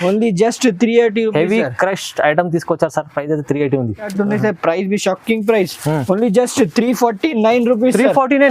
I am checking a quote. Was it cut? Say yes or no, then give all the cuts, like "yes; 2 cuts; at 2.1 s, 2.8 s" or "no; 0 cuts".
yes; 1 cut; at 4.1 s